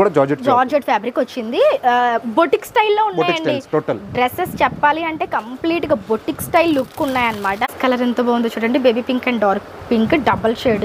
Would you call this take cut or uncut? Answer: cut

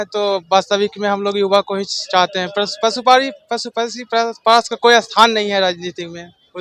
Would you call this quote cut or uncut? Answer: uncut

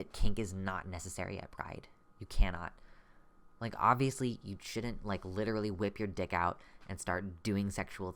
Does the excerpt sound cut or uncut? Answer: uncut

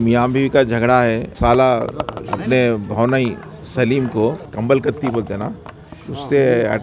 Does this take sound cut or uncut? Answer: cut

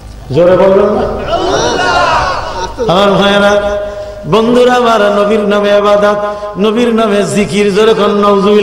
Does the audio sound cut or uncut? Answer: uncut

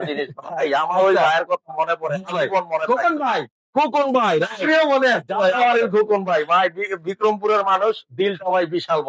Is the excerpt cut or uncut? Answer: uncut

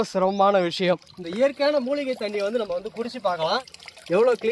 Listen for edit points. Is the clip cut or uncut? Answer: cut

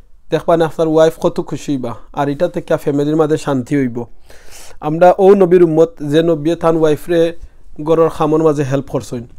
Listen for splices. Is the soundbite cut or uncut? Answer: uncut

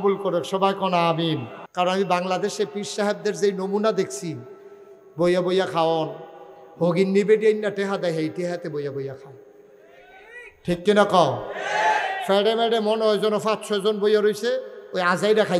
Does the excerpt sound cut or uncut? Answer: cut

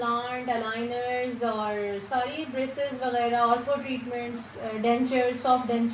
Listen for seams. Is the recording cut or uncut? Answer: uncut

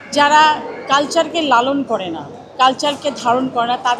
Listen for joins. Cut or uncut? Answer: uncut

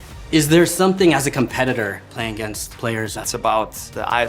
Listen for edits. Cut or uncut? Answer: cut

